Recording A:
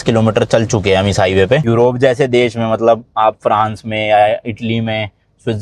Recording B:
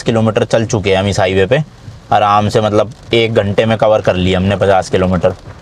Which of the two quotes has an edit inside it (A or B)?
A